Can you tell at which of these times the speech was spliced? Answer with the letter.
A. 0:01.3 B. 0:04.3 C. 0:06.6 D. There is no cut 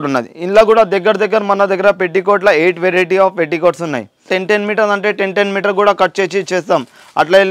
B